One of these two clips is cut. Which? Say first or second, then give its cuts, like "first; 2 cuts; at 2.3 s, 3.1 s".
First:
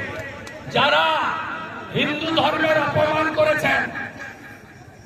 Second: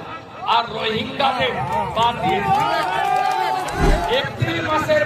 second; 1 cut; at 4.0 s